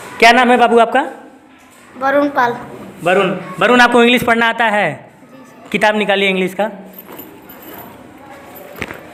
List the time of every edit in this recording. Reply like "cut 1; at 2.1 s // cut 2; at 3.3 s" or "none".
none